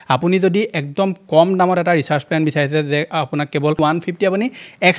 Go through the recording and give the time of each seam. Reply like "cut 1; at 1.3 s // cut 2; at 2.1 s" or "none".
cut 1; at 3.8 s